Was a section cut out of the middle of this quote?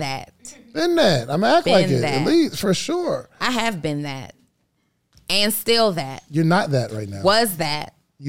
no; 0 cuts

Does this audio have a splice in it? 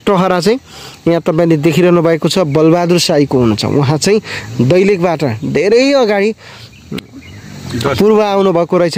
no; 0 cuts

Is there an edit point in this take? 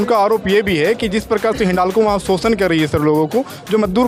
no; 0 cuts

